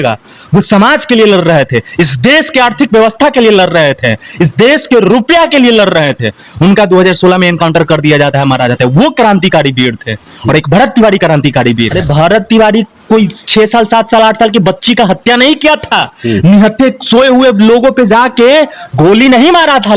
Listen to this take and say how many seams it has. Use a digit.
1